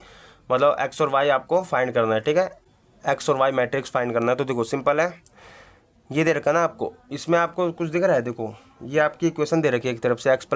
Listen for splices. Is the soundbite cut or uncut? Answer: uncut